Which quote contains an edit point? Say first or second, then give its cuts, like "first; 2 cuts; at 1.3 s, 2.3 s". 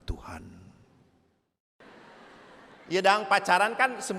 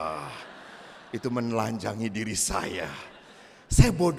first; 1 cut; at 1.8 s